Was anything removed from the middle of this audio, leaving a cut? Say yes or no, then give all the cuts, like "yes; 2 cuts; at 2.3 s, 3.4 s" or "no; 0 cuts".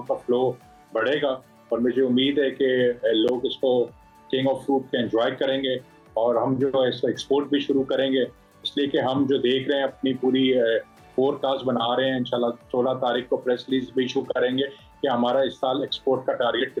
no; 0 cuts